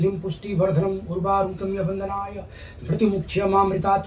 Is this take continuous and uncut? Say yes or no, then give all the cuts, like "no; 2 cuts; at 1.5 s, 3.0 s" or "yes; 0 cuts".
yes; 0 cuts